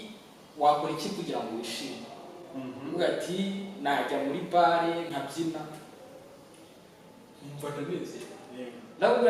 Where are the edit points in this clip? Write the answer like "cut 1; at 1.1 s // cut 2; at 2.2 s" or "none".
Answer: none